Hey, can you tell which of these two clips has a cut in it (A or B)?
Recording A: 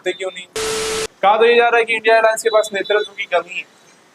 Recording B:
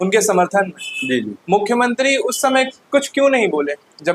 A